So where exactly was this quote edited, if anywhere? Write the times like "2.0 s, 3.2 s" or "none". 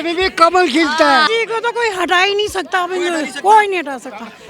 1.3 s